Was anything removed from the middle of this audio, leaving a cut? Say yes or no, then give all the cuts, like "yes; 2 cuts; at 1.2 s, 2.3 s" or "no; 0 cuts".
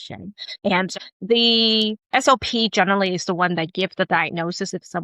yes; 1 cut; at 0.9 s